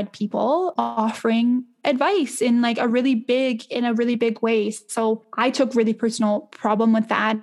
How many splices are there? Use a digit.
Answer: 2